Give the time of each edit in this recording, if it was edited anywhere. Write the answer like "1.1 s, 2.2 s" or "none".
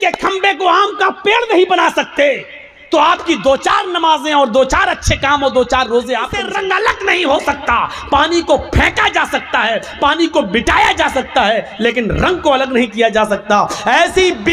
6.4 s